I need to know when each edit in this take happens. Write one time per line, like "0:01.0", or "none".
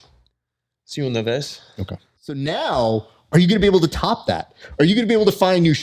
0:02.3